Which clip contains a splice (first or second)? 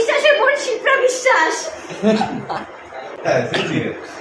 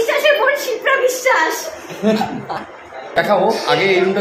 second